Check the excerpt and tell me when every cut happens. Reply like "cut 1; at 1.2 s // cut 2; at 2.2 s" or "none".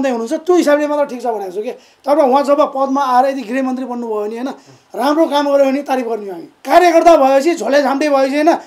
cut 1; at 6.5 s